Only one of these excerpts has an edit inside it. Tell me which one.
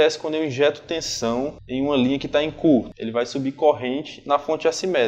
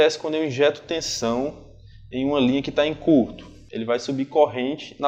first; 2 cuts; at 1.6 s, 3.0 s

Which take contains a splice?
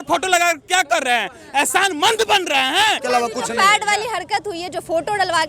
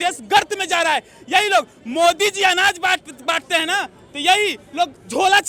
first; 1 cut; at 3.0 s

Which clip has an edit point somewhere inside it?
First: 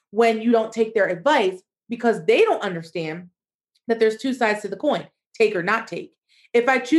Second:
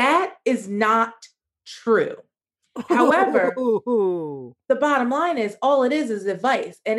second; 1 cut; at 4.4 s

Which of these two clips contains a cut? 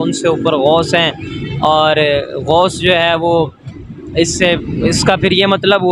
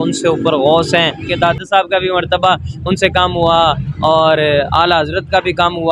second; 1 cut; at 1.3 s

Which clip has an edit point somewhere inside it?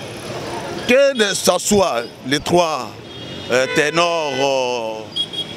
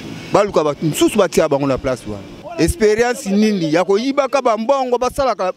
second; 1 cut; at 2.4 s

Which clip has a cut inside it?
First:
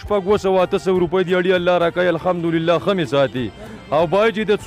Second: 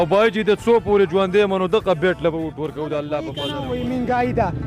second; 1 cut; at 3.3 s

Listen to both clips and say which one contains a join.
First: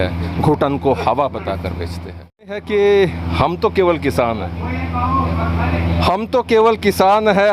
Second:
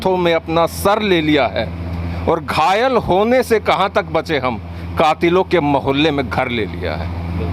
first; 1 cut; at 2.6 s

